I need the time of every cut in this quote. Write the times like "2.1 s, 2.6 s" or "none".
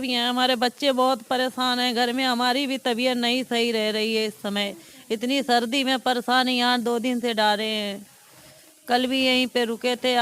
none